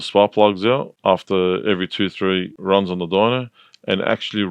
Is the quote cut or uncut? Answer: cut